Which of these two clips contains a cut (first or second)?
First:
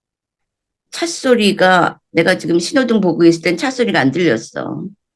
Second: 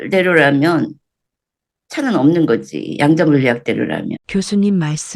second